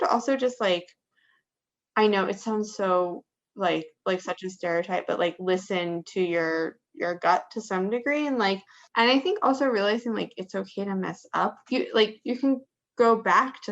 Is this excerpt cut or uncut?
cut